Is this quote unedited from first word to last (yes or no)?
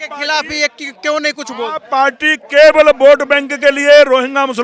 yes